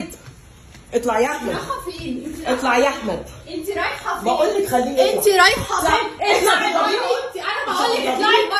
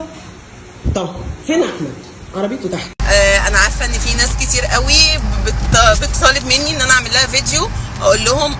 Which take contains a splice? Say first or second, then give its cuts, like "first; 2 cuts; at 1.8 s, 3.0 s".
second; 1 cut; at 2.9 s